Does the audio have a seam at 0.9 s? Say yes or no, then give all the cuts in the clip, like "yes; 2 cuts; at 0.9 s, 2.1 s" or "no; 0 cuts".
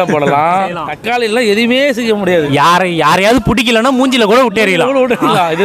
yes; 1 cut; at 0.9 s